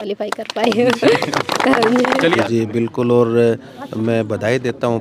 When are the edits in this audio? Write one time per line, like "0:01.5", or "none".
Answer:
0:02.4